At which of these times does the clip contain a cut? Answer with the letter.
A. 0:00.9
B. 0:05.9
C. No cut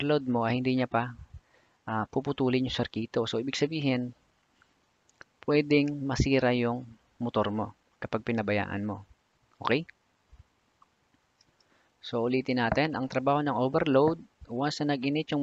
C